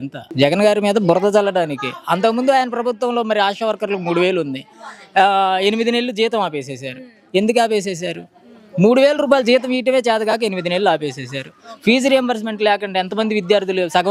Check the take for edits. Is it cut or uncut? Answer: uncut